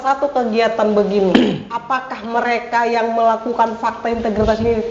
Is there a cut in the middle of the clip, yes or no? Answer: no